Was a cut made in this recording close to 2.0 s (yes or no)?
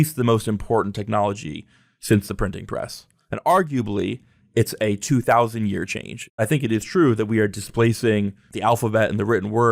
no